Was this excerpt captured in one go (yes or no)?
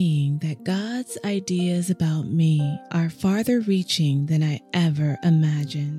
yes